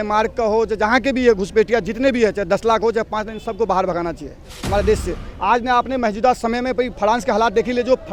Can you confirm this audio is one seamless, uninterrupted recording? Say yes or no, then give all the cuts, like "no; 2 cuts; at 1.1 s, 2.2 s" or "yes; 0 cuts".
yes; 0 cuts